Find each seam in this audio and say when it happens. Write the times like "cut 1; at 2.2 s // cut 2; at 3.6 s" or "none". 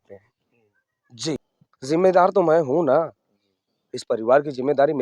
cut 1; at 1.4 s